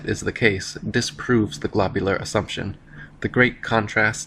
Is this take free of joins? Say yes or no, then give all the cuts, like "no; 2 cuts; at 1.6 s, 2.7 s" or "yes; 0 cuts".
yes; 0 cuts